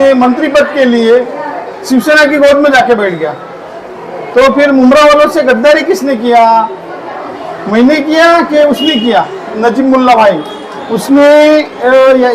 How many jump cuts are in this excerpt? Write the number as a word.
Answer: one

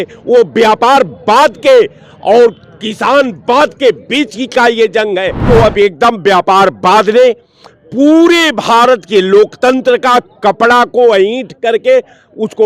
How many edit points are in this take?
one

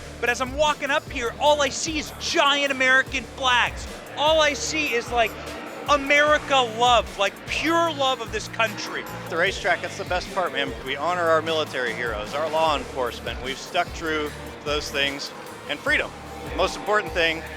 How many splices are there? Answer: two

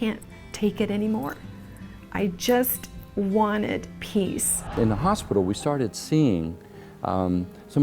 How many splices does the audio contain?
one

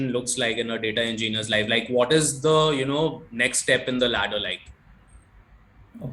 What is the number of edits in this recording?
zero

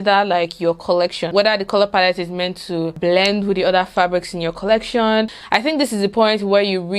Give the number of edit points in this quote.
three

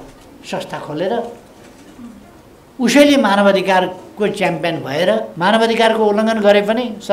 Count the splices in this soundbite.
one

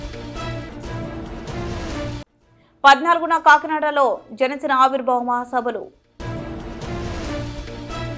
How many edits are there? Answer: zero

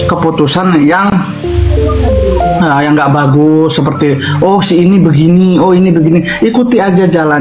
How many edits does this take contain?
zero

